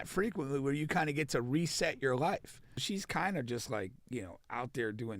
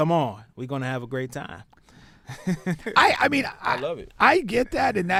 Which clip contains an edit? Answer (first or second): first